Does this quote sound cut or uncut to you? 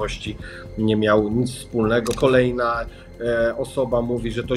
cut